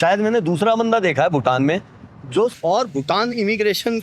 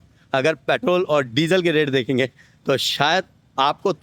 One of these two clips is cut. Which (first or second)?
first